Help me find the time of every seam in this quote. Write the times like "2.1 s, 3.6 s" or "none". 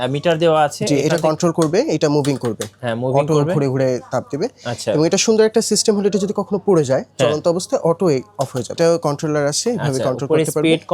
8.8 s